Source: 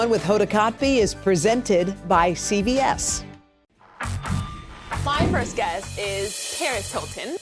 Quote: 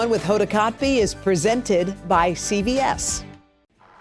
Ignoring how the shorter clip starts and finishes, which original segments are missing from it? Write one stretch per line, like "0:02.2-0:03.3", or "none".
none